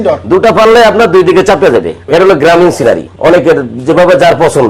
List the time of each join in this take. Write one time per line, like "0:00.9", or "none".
0:02.0
0:03.1